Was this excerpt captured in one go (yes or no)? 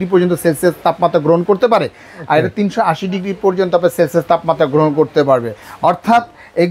yes